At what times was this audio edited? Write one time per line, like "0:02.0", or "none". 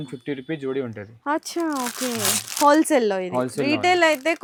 none

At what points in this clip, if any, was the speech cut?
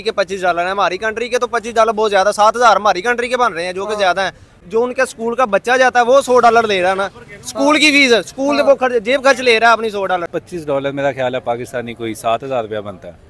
0:04.5
0:10.3

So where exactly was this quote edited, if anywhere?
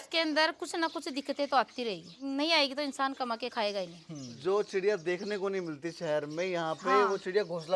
0:02.1
0:04.3

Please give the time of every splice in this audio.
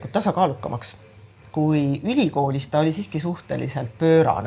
0:01.4

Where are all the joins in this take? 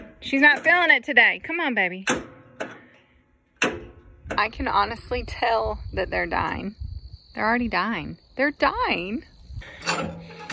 0:04.4
0:09.5

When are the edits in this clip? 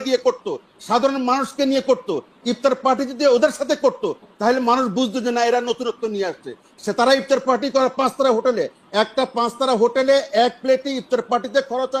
none

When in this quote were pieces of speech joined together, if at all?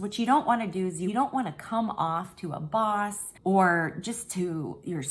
0:01.0
0:03.3

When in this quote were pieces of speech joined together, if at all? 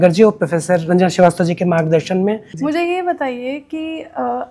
0:02.5

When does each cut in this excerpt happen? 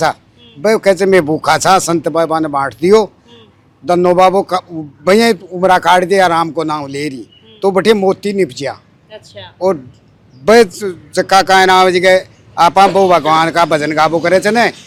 none

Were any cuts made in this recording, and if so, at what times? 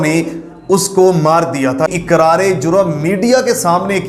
0:01.9

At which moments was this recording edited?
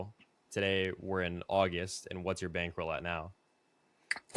none

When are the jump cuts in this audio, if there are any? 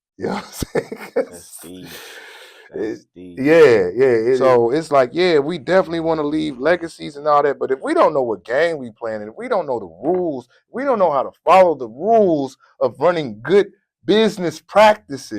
0:04.4

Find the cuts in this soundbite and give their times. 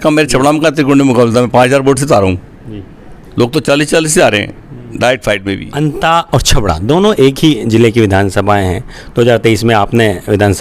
0:05.6

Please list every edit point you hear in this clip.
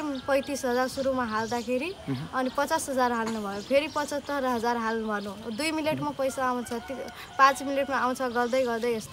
none

